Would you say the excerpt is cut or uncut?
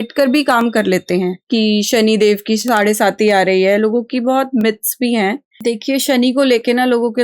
cut